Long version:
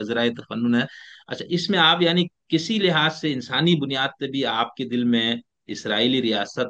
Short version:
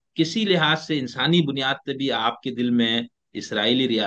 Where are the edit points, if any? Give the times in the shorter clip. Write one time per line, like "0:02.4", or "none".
none